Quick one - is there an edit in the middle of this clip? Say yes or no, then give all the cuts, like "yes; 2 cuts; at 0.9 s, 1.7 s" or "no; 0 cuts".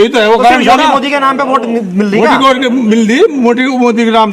no; 0 cuts